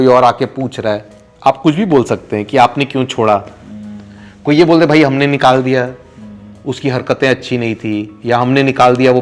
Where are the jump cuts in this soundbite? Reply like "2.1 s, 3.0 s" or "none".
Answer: none